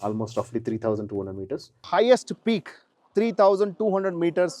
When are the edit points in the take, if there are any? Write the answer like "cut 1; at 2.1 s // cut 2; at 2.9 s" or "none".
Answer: cut 1; at 1.7 s